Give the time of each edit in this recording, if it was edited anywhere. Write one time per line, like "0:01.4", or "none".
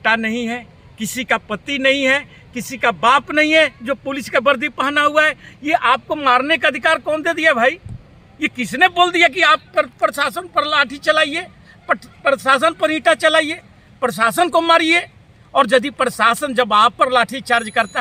none